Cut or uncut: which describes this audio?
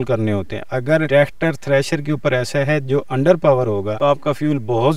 cut